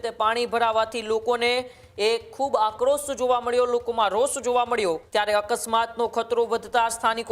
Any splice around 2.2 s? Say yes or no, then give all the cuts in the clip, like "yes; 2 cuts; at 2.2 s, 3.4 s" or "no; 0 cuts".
no; 1 cut; at 5.0 s